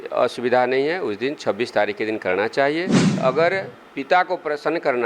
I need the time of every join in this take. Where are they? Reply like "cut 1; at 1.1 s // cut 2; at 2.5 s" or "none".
cut 1; at 3.2 s